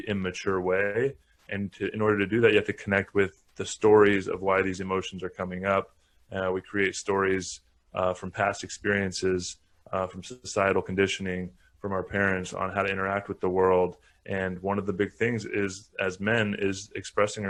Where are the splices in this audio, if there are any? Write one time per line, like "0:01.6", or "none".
none